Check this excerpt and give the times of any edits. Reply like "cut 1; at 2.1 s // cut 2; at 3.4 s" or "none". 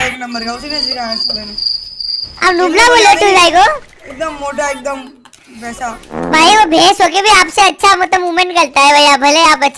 none

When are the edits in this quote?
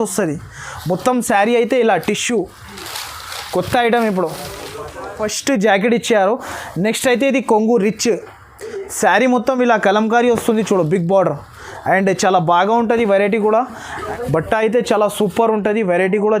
cut 1; at 5.3 s // cut 2; at 13.9 s

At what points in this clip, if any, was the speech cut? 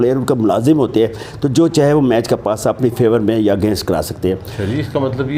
none

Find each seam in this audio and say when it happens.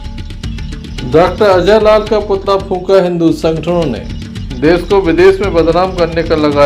cut 1; at 0.9 s

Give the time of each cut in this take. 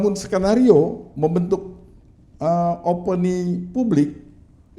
none

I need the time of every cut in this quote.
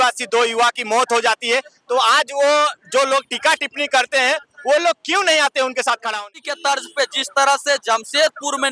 cut 1; at 6.5 s

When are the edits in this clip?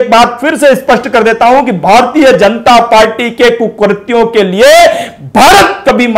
none

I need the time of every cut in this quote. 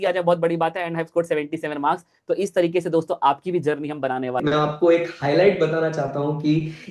cut 1; at 4.4 s

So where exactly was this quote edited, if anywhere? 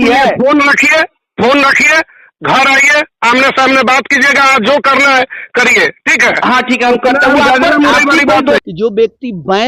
cut 1; at 8.7 s

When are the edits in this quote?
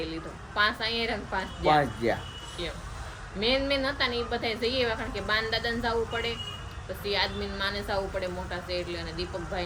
none

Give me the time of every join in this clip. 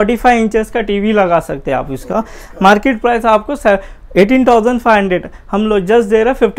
none

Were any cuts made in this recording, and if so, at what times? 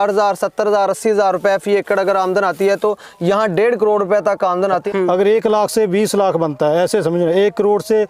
cut 1; at 4.8 s

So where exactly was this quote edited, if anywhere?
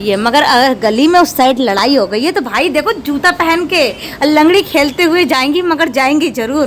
none

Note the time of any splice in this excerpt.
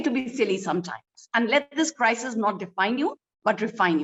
none

